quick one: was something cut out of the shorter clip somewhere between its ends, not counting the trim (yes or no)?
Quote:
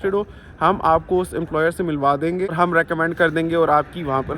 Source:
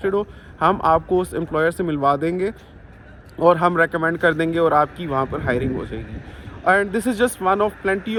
yes